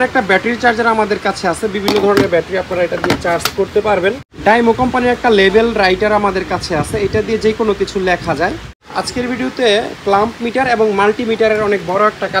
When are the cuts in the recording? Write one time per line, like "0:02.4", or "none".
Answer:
0:04.3
0:08.8